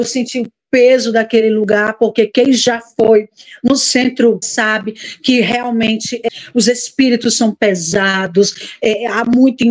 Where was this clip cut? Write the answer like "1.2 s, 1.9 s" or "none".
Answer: 4.5 s, 6.2 s